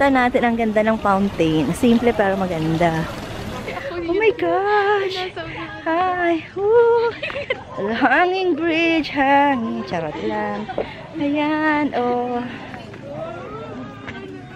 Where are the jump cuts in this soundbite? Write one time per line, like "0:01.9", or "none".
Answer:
0:03.8